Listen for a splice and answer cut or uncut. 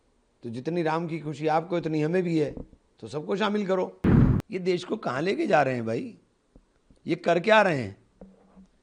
cut